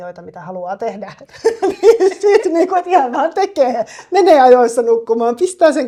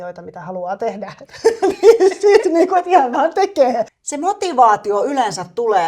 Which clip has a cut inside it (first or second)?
second